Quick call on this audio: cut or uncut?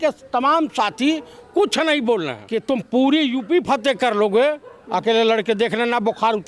cut